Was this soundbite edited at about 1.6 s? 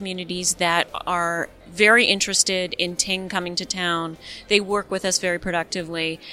yes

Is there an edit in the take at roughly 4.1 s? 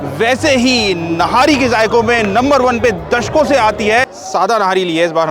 yes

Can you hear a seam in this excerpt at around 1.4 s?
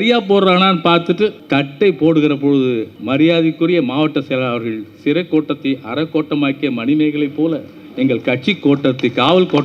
yes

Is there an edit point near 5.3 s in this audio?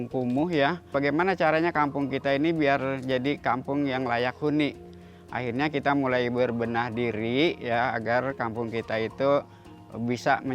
no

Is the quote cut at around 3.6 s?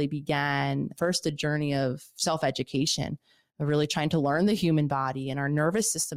no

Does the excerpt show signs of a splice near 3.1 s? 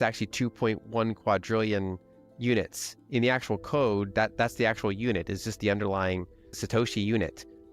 no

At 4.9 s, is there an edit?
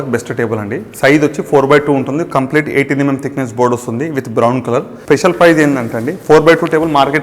yes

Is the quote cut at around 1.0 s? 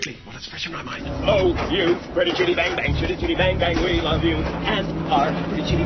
yes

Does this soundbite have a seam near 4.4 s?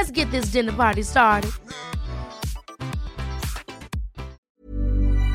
yes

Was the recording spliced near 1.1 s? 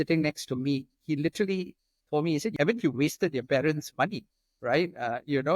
no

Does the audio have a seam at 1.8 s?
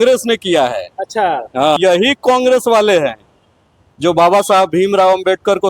yes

